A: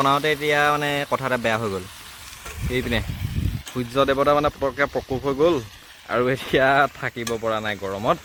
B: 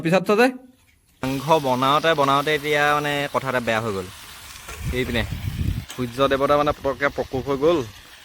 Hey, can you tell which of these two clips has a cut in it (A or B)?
B